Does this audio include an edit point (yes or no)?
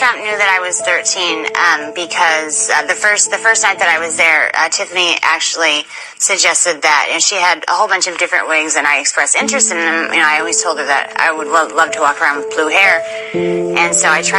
no